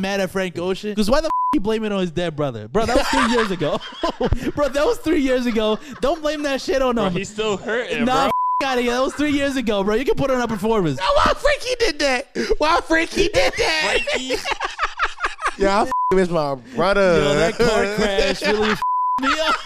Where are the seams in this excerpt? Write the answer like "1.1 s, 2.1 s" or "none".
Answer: 0.9 s, 11.0 s, 15.4 s